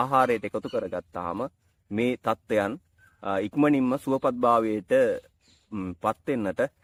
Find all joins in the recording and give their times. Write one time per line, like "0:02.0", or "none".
none